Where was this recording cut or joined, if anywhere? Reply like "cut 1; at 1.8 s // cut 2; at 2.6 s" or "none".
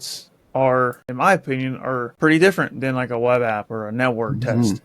cut 1; at 1.0 s // cut 2; at 2.1 s